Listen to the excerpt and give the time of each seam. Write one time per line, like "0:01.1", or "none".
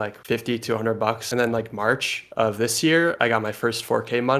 0:01.2

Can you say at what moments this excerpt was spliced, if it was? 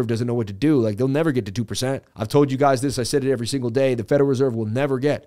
0:02.1

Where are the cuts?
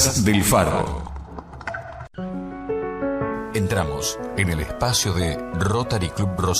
0:02.1

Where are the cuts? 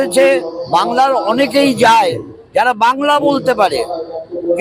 none

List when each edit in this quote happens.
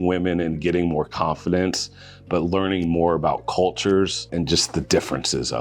0:04.3

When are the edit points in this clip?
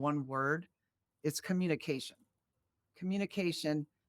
0:01.1

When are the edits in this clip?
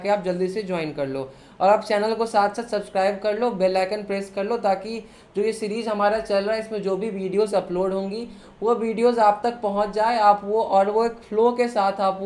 none

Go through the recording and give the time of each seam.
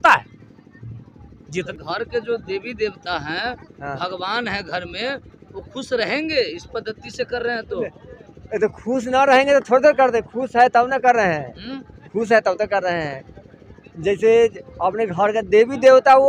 0:01.7

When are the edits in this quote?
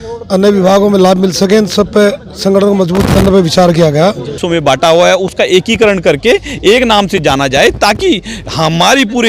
0:04.4

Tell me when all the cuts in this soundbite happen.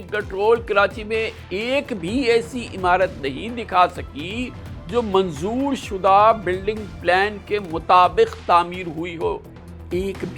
none

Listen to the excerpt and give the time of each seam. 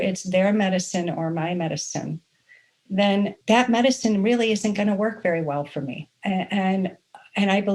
0:06.1

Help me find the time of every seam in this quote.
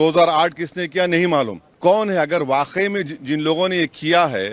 0:01.6

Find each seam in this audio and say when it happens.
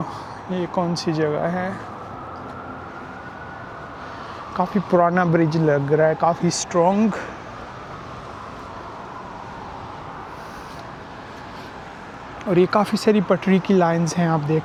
none

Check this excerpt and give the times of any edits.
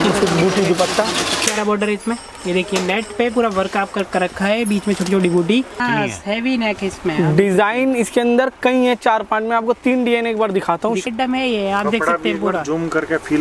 0:01.5
0:05.8
0:11.0

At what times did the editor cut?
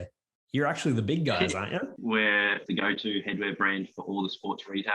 0:01.9
0:02.6

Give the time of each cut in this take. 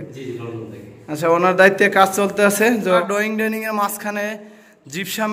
0:03.0

